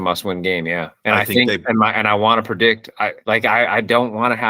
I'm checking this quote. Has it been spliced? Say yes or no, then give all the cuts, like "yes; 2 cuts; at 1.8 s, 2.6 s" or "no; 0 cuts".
no; 0 cuts